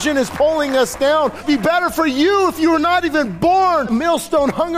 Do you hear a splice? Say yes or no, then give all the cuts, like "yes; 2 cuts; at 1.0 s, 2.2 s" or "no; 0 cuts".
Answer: yes; 2 cuts; at 1.4 s, 3.9 s